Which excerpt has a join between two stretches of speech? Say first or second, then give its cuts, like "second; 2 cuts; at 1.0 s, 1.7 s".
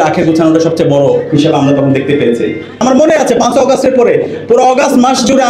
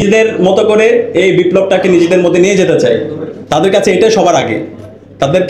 first; 1 cut; at 2.8 s